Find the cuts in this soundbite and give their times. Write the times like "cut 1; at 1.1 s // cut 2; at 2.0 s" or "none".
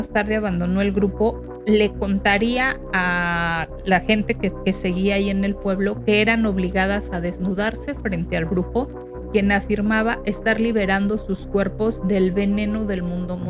none